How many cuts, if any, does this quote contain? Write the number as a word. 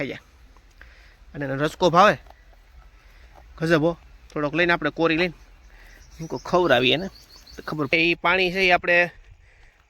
one